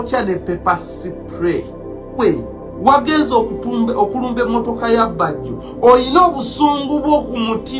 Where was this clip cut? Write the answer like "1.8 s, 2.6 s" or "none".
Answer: 2.2 s